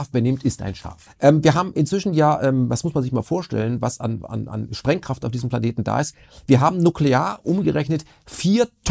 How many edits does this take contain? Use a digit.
1